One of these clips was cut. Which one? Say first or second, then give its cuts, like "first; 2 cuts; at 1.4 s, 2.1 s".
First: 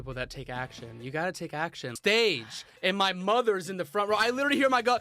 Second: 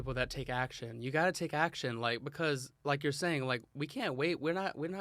first; 1 cut; at 1.9 s